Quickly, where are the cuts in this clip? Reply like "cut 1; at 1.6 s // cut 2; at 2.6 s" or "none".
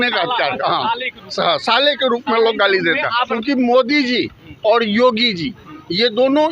cut 1; at 3.2 s